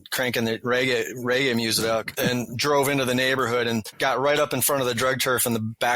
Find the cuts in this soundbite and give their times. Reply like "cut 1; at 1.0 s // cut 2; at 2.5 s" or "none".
cut 1; at 2.1 s // cut 2; at 3.9 s